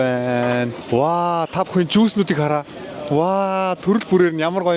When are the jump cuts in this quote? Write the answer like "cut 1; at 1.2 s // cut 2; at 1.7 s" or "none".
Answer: none